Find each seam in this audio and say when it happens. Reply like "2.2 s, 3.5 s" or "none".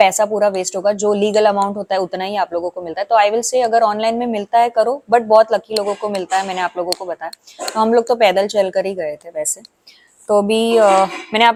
none